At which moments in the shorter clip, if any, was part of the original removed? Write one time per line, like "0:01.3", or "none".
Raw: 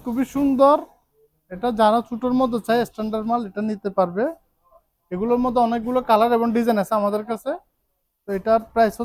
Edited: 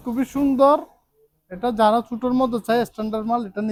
none